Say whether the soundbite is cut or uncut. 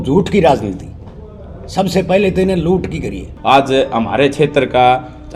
cut